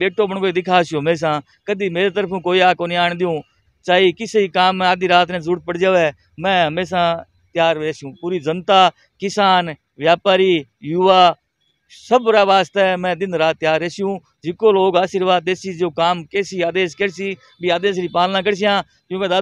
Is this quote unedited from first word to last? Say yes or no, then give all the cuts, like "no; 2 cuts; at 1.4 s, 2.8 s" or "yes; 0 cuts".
yes; 0 cuts